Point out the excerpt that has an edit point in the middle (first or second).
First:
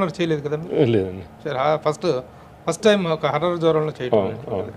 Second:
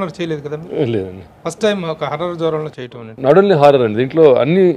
second